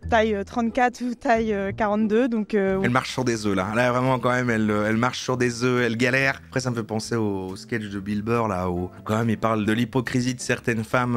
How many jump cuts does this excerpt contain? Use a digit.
3